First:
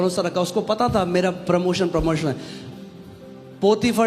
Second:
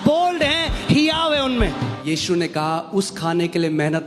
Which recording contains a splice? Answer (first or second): second